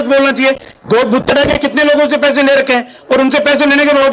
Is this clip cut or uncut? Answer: uncut